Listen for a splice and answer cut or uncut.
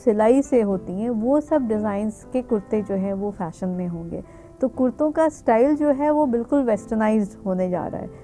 uncut